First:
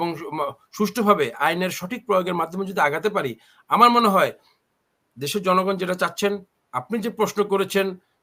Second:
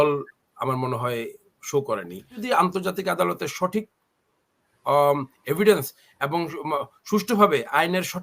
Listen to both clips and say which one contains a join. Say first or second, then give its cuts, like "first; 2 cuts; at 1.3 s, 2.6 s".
second; 1 cut; at 2.4 s